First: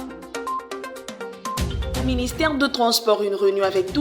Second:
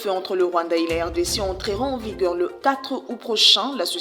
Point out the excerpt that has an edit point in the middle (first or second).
first